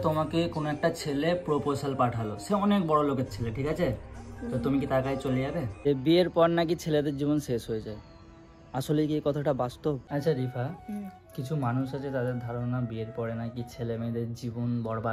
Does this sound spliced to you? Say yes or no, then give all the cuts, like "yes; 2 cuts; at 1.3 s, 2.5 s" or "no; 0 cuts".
yes; 2 cuts; at 5.8 s, 10.1 s